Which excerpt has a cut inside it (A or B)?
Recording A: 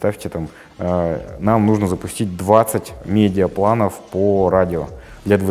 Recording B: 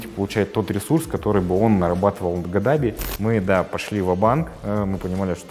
B